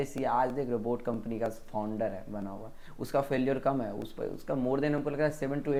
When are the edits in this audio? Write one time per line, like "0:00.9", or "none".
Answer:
none